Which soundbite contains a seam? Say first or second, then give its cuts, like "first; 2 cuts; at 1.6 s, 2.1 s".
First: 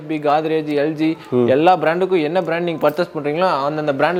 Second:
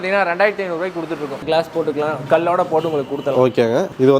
second; 1 cut; at 1.3 s